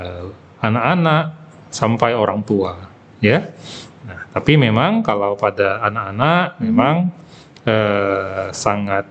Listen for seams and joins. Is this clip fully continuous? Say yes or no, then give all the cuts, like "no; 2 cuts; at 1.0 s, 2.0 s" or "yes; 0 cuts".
yes; 0 cuts